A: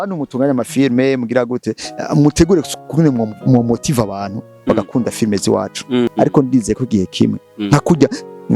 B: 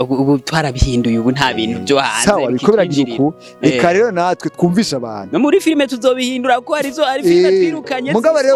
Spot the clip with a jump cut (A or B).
A